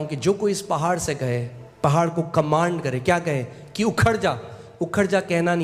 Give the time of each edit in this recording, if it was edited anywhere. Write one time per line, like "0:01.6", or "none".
none

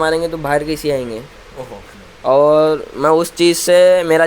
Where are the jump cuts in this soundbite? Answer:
0:01.9

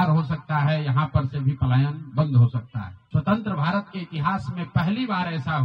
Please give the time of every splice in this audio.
0:03.0

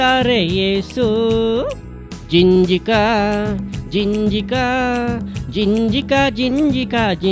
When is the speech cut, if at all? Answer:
none

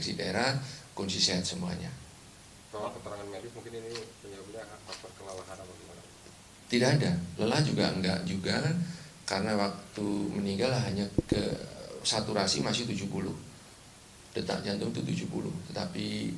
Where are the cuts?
0:04.7
0:11.4

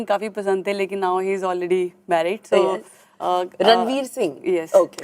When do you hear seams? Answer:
none

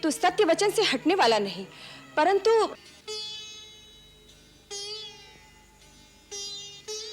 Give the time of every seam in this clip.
0:02.8

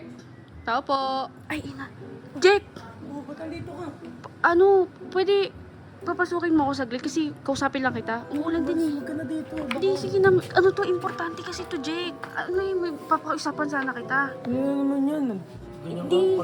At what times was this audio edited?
0:01.4
0:08.3
0:12.3

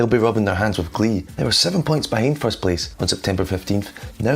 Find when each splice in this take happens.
0:01.3
0:02.9

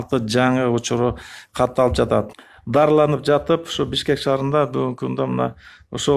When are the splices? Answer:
0:02.4

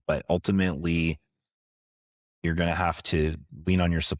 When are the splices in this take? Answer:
none

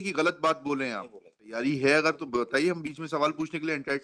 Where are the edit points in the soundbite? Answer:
0:01.6

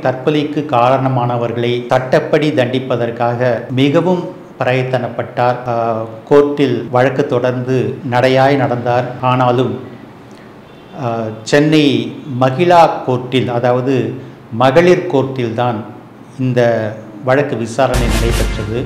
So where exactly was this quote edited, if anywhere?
0:01.8
0:03.7
0:05.6
0:06.8
0:08.0
0:09.1

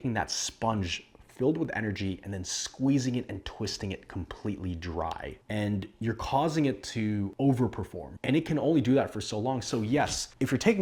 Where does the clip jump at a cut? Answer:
none

